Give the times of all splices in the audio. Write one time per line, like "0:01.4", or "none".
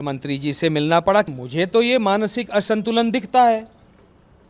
0:01.3